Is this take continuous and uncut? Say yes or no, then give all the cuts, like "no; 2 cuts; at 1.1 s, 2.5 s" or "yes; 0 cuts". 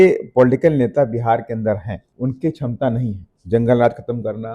no; 2 cuts; at 2.0 s, 3.3 s